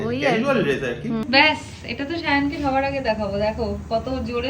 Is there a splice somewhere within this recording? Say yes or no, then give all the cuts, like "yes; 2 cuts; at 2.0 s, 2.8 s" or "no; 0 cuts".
yes; 1 cut; at 1.2 s